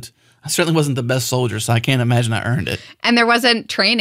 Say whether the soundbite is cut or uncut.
cut